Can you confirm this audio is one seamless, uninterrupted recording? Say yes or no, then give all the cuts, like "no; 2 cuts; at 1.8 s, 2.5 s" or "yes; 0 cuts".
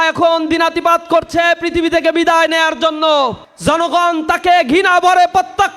no; 1 cut; at 3.5 s